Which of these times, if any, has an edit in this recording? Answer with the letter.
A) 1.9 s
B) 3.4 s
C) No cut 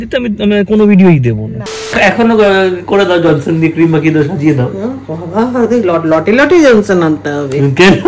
A